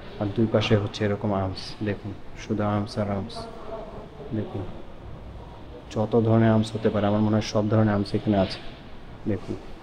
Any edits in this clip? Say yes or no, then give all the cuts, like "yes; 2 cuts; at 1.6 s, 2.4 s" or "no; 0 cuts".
no; 0 cuts